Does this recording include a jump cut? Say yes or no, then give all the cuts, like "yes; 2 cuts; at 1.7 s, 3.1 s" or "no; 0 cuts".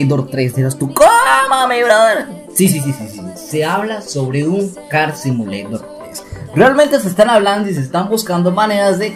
no; 0 cuts